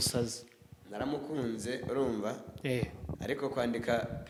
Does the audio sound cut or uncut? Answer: uncut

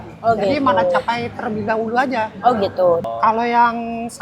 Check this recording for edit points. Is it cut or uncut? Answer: cut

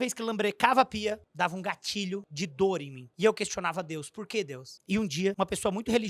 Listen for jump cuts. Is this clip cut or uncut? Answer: cut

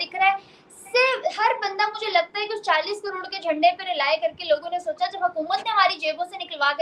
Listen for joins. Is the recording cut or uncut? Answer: uncut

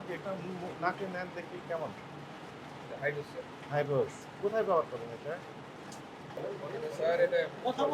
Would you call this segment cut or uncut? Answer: cut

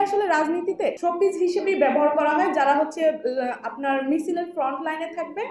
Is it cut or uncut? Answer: cut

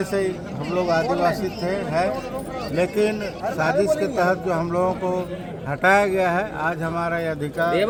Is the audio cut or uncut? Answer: uncut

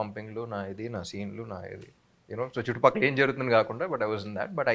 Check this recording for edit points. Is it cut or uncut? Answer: uncut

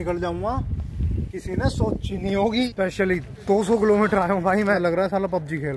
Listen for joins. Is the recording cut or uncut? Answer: cut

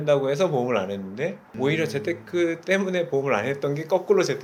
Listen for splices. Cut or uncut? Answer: uncut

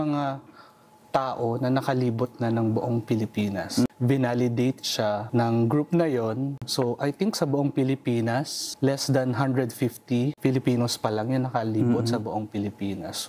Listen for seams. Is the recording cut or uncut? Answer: cut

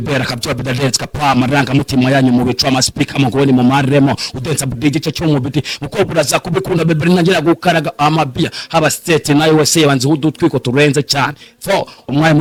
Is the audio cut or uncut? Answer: uncut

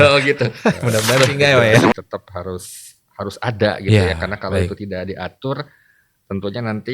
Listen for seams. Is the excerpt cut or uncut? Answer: cut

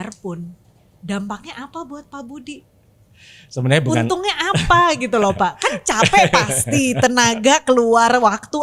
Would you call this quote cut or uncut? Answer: uncut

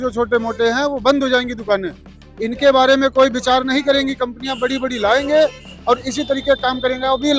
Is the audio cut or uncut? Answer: uncut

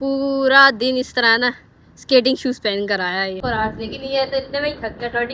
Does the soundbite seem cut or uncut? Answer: cut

